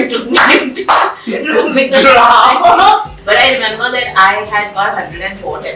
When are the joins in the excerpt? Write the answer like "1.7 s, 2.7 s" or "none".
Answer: 3.1 s

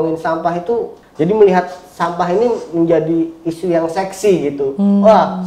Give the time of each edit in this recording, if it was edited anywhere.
1.0 s

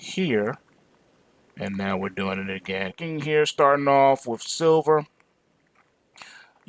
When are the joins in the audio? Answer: none

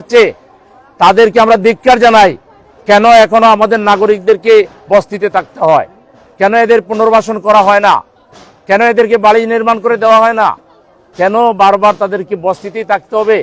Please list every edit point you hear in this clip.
none

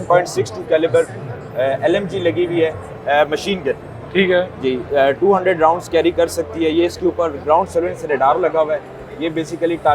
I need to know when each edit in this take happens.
none

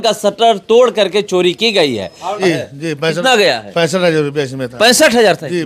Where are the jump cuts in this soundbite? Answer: 2.4 s

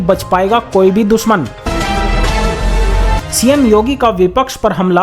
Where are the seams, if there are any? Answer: 1.6 s, 3.3 s

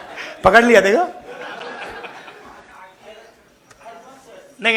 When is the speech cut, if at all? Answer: none

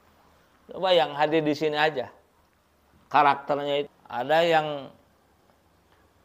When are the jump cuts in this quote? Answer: 4.0 s

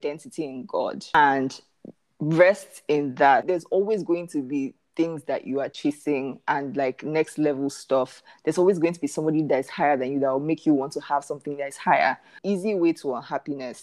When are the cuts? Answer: 1.1 s, 12.3 s

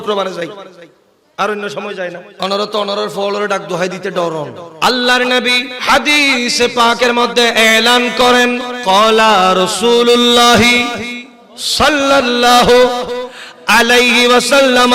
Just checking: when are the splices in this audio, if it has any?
2.3 s, 4.6 s, 5.7 s, 8.7 s

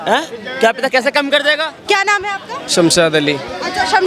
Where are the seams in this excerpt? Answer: 1.7 s

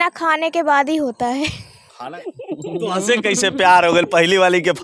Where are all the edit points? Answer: 2.2 s

